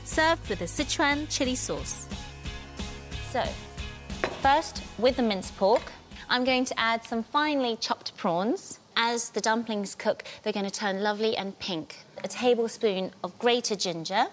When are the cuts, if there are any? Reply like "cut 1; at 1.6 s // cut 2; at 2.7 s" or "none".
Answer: none